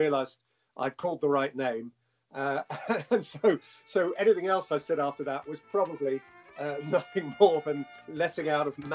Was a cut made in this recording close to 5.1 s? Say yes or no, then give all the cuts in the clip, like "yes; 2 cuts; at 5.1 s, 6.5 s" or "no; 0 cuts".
no; 1 cut; at 8.0 s